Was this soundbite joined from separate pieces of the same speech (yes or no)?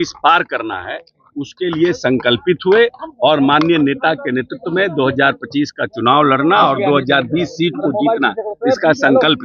no